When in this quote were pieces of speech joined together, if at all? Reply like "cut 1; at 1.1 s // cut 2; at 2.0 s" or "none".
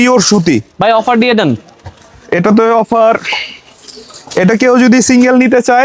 none